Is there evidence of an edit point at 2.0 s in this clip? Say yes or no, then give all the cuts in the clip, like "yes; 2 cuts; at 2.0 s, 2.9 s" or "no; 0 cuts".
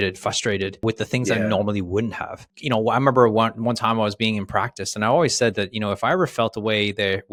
no; 0 cuts